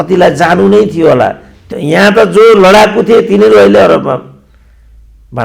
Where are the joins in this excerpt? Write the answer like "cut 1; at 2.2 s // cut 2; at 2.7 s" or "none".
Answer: cut 1; at 1.6 s